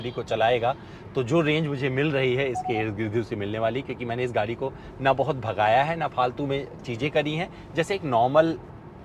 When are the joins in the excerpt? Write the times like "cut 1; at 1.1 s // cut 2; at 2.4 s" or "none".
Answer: none